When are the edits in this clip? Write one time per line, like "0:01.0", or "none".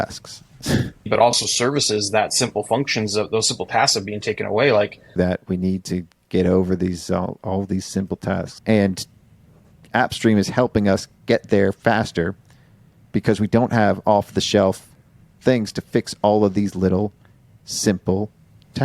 0:01.1
0:05.1
0:08.5
0:09.7

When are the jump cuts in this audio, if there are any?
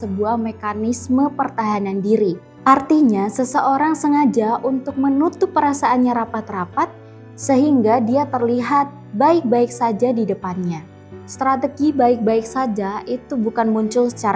0:11.0

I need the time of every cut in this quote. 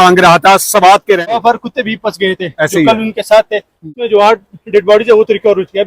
0:01.3
0:03.8

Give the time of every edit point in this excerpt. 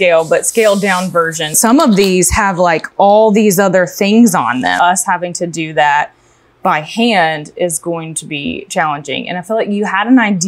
0:01.6
0:04.7

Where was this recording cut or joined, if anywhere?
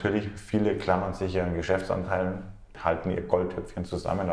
0:02.7

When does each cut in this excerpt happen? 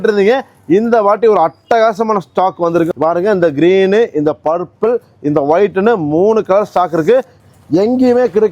0:02.9
0:07.4

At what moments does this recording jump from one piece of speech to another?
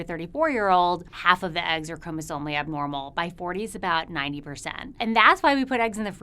0:01.1
0:05.0

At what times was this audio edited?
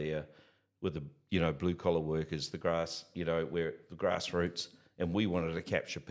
none

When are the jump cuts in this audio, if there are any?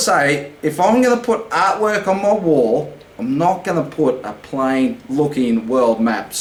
none

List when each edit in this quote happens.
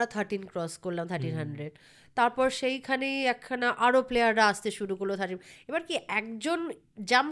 none

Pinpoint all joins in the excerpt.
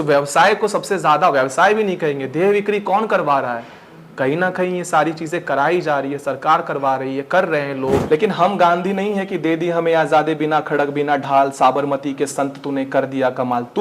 0:08.0

